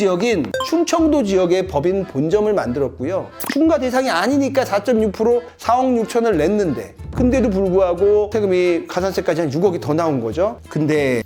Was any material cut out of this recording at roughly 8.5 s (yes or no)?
no